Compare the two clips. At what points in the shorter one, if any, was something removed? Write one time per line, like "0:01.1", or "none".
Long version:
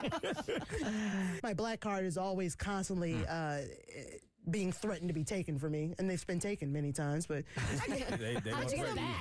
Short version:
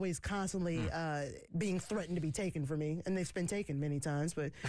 0:01.4